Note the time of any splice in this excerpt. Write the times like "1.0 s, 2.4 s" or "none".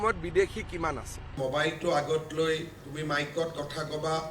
1.3 s